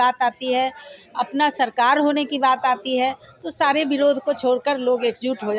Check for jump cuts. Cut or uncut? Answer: uncut